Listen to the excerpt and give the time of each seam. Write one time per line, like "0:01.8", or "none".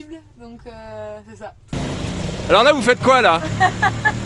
0:01.8